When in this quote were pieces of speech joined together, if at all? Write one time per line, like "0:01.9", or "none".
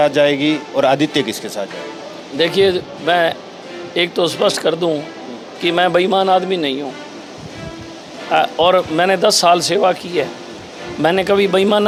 none